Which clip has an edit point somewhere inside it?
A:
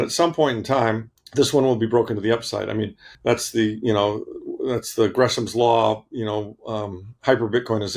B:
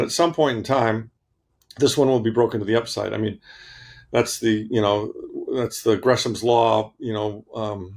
A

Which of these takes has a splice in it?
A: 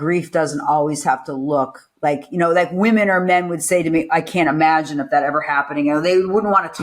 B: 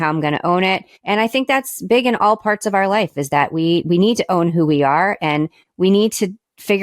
B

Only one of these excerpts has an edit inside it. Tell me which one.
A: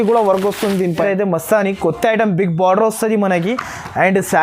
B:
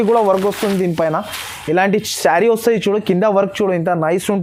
A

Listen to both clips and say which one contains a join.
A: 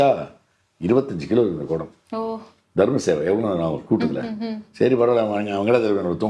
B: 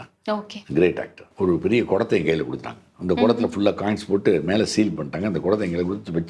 B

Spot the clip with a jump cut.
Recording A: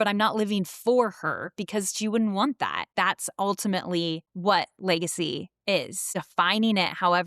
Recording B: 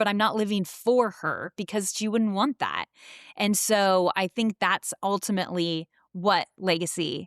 A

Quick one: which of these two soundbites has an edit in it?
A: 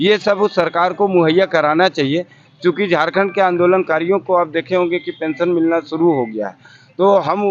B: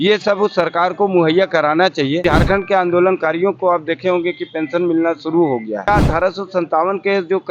B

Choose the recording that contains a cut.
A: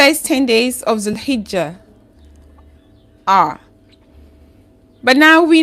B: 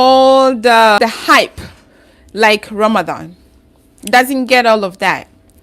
B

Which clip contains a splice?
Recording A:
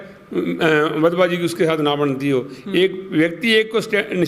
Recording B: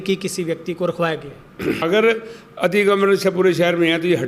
B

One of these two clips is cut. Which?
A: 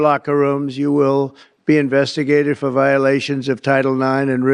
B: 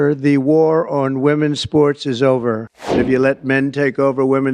B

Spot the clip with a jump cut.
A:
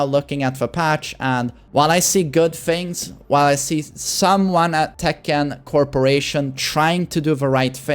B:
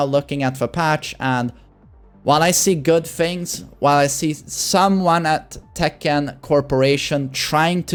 A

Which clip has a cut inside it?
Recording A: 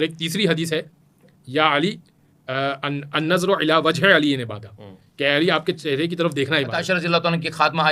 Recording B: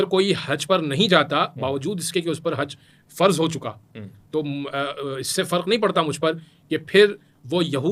A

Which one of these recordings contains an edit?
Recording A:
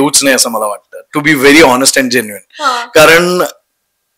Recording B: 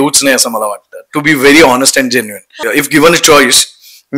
B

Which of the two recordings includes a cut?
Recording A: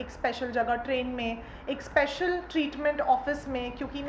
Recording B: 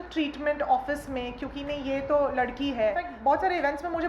B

